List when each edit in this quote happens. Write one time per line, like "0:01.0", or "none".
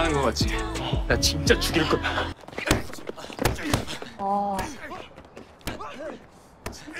0:02.4
0:04.0